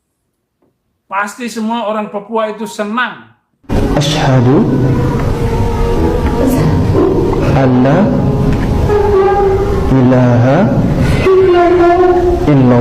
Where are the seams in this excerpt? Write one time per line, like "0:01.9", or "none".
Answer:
0:03.7